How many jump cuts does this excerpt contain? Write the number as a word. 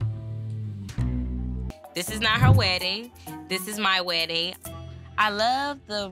one